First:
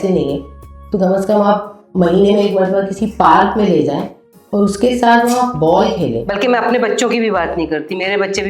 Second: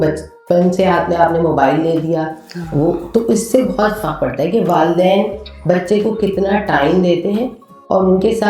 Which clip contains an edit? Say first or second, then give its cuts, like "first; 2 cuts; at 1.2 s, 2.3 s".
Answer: first; 1 cut; at 6.2 s